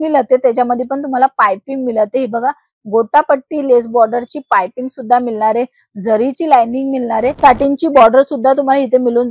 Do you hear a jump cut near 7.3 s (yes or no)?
yes